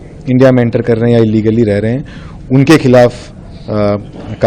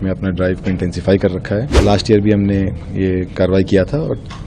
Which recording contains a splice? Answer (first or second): second